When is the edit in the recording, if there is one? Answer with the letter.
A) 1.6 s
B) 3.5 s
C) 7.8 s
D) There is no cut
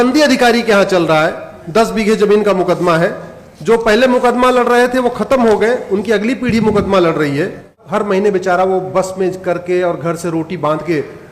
C